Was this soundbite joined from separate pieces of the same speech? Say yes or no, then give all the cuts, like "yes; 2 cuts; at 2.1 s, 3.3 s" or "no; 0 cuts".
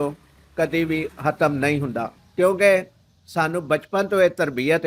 yes; 1 cut; at 2.2 s